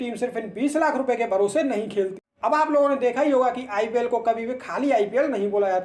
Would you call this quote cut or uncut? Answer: cut